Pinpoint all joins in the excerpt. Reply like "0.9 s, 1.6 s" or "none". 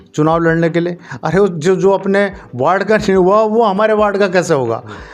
none